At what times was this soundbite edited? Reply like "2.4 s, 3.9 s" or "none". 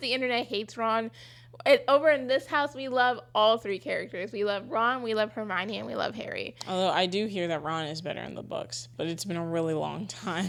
none